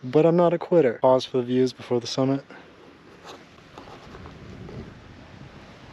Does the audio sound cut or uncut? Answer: cut